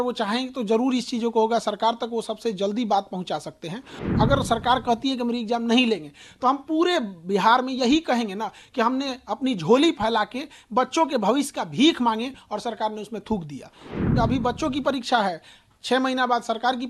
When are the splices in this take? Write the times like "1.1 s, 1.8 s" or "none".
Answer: 4.0 s, 14.0 s